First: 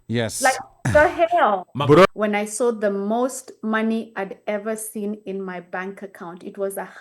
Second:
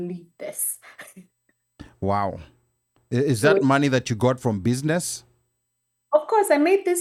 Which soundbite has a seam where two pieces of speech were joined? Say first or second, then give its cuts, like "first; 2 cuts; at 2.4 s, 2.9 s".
first; 1 cut; at 2.1 s